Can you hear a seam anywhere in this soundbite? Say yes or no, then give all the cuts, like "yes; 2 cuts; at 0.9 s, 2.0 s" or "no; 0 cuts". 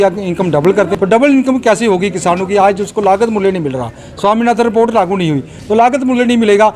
yes; 1 cut; at 0.9 s